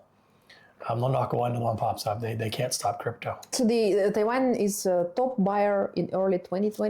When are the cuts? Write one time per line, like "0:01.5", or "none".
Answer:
0:03.5